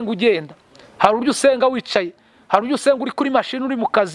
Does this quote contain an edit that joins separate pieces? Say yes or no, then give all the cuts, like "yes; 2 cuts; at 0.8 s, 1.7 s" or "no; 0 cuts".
no; 0 cuts